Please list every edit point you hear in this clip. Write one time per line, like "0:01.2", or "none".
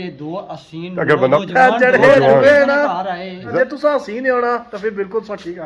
0:01.4
0:03.4